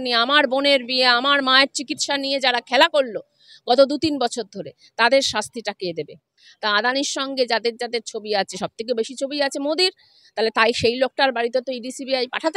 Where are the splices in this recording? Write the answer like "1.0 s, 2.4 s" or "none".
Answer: 6.4 s